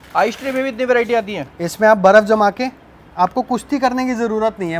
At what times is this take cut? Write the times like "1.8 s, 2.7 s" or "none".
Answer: none